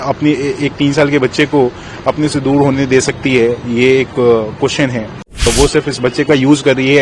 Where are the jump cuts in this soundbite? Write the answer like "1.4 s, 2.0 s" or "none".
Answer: 5.5 s